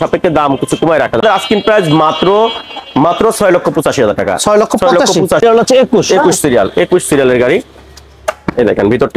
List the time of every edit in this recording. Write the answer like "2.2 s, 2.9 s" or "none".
1.2 s, 5.4 s